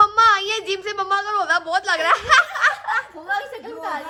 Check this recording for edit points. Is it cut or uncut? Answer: uncut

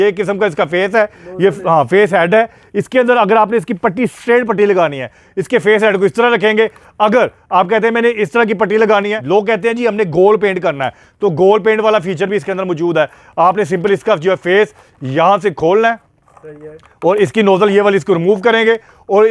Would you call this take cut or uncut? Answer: cut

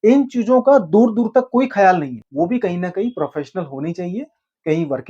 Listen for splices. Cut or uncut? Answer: cut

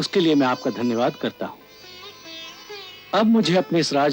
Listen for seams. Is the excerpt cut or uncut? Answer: uncut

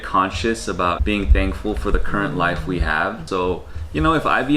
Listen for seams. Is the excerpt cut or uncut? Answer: cut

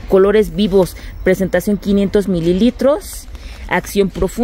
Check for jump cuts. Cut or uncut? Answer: uncut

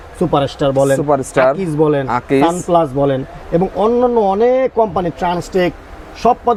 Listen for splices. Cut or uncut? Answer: uncut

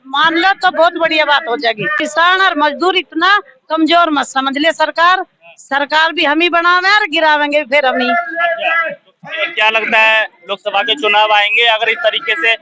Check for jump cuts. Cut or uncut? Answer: uncut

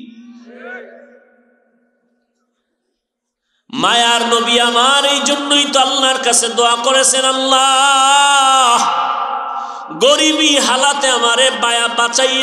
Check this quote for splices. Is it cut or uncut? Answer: uncut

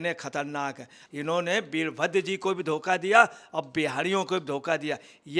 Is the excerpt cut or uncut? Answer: cut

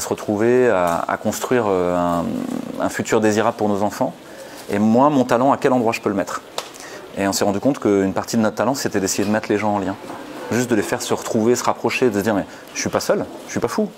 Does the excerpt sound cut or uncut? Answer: uncut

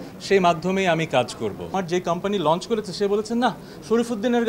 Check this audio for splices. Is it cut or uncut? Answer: cut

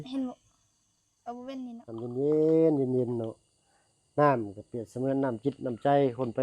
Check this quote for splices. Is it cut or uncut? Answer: cut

